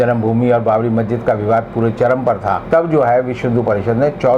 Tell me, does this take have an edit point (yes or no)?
yes